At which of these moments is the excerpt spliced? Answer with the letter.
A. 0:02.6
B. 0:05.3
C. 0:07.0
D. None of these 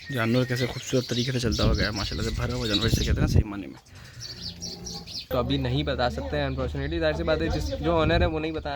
B